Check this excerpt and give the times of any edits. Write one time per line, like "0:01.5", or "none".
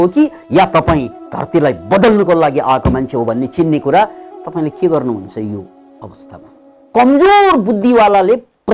0:06.8